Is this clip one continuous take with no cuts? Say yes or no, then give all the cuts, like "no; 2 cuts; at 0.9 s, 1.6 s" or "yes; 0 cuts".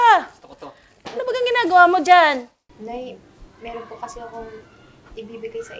no; 1 cut; at 2.6 s